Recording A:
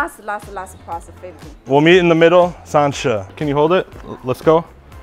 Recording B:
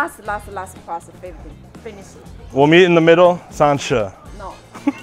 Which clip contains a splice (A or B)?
A